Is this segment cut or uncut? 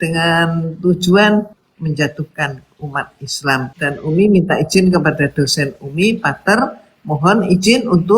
cut